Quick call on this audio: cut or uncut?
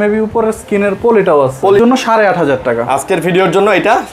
cut